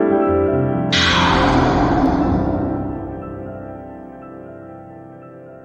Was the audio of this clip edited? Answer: no; 0 cuts

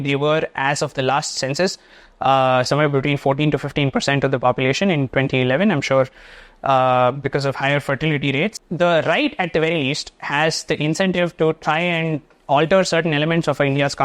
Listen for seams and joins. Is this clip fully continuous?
no; 1 cut; at 8.6 s

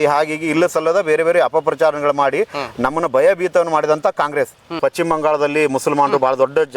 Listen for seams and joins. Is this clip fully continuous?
no; 1 cut; at 4.8 s

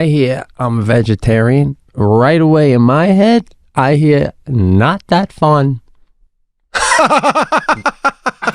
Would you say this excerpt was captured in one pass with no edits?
yes; 0 cuts

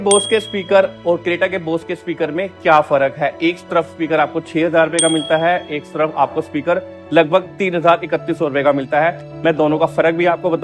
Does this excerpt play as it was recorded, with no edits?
yes; 0 cuts

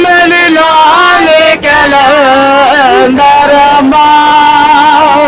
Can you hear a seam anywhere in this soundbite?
no; 0 cuts

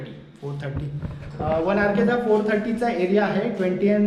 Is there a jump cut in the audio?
no; 0 cuts

